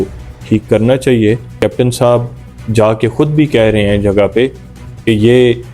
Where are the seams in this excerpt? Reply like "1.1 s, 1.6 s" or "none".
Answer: 1.5 s